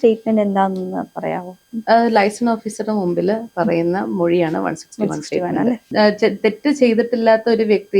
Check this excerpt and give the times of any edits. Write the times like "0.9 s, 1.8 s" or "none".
5.8 s

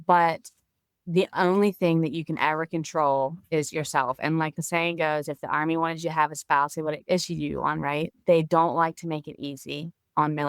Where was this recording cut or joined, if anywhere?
7.0 s, 8.1 s

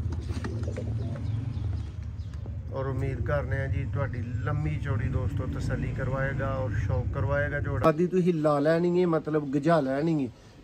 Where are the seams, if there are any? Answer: 8.0 s

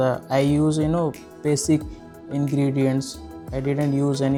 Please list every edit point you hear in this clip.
none

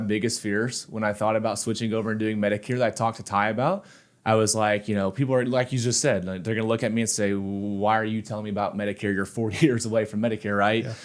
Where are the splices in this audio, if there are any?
none

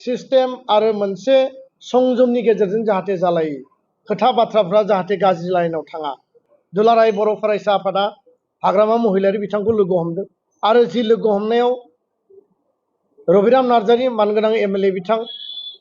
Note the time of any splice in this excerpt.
6.5 s

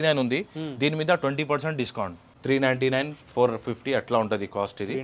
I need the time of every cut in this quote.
2.2 s

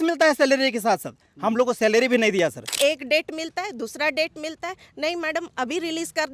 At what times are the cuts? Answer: 2.6 s

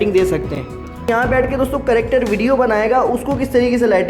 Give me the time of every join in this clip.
1.1 s

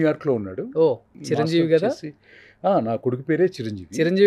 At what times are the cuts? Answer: 1.1 s

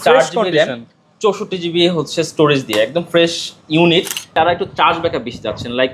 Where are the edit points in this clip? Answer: 4.3 s

